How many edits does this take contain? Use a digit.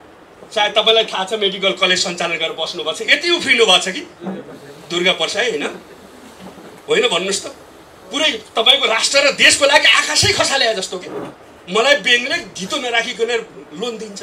0